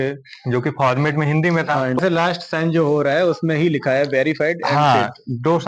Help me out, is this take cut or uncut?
cut